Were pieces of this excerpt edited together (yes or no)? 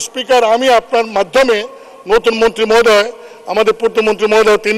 no